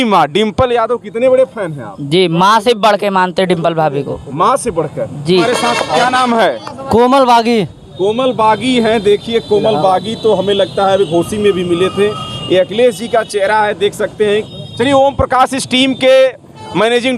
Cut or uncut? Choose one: cut